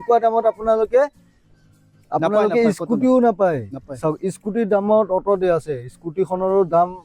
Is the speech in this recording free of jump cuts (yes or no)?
yes